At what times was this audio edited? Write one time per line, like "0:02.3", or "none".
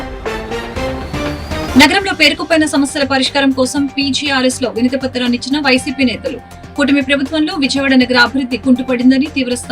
0:01.5